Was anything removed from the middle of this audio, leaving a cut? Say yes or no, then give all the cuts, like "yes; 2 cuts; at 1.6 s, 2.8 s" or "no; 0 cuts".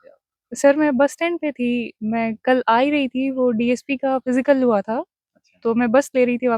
no; 0 cuts